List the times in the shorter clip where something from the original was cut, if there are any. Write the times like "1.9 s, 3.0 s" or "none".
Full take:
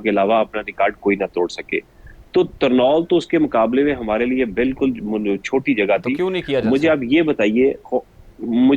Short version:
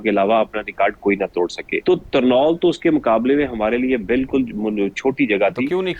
1.7 s

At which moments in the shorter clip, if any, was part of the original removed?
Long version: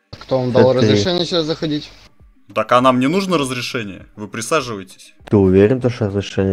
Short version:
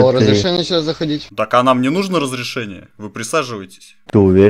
1.3 s

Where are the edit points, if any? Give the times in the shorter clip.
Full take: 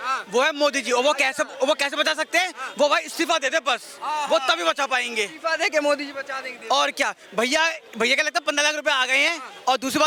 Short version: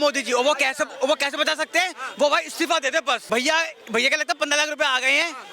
3.2 s

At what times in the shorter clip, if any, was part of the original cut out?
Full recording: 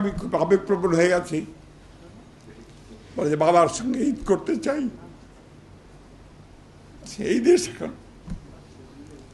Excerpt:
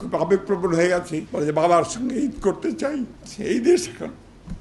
1.2 s, 3.2 s

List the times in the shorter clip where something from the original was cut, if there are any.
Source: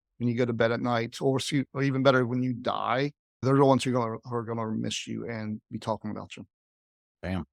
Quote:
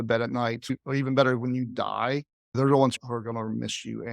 0.7 s, 2.9 s

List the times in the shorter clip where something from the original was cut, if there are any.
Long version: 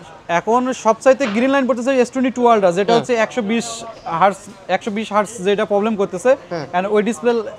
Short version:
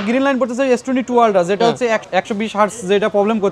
2.0 s

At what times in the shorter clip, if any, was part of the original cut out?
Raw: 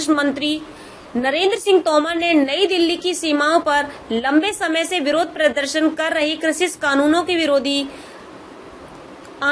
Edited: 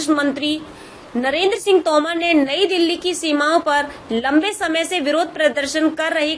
none

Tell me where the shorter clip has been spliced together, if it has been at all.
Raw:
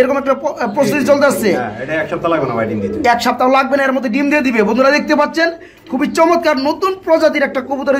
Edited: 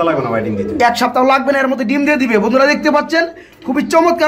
none

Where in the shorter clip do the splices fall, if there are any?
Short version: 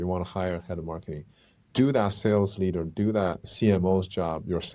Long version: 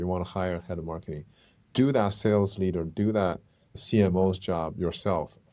3.4 s

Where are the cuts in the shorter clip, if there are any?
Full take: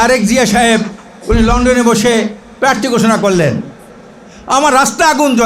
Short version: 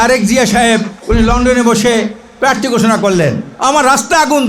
1.0 s, 3.5 s

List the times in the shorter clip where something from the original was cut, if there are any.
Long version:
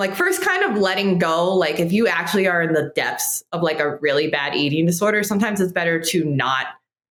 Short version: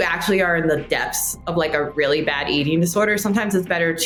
none

